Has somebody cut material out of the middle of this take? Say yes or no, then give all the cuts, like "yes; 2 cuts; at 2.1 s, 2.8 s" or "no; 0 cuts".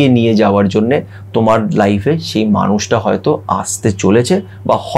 no; 0 cuts